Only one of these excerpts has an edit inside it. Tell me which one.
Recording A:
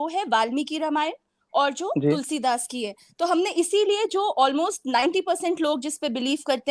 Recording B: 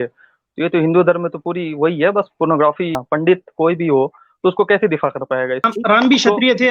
B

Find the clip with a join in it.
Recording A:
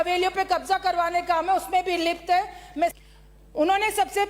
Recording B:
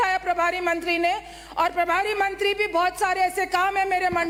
A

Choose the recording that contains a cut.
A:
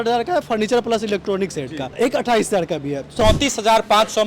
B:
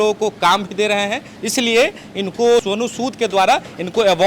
A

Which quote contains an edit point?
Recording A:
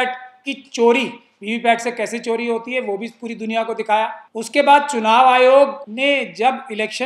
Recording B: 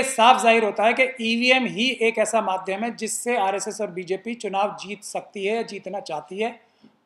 A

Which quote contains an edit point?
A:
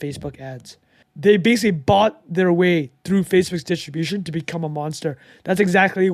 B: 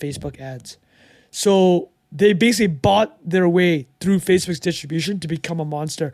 A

